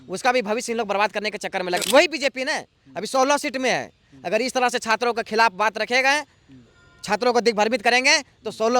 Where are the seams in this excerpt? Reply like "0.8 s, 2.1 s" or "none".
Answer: 1.8 s